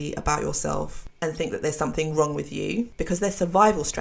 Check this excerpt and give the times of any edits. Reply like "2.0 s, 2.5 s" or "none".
1.0 s, 3.0 s